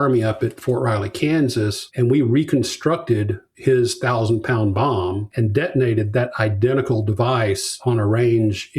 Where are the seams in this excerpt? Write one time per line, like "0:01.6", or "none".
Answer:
0:05.3